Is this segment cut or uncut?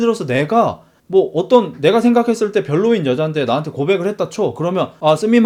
uncut